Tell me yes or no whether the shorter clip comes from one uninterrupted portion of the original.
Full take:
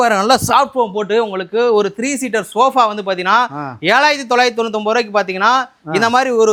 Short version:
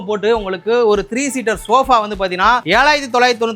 no